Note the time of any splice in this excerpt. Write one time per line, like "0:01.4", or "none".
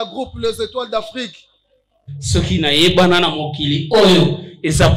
0:02.1